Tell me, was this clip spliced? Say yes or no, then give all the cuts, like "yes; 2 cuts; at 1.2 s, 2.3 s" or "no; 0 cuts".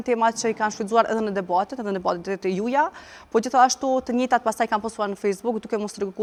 no; 0 cuts